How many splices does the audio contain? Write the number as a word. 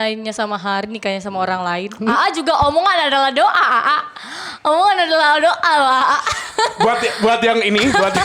zero